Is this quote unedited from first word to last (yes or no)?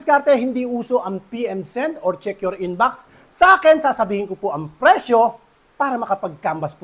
yes